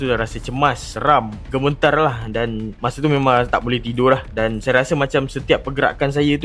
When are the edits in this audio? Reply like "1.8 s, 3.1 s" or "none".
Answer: none